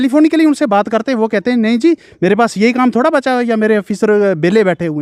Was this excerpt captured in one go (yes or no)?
yes